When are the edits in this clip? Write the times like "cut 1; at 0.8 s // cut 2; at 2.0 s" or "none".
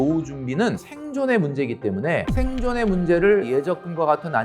cut 1; at 0.8 s // cut 2; at 2.3 s // cut 3; at 3.5 s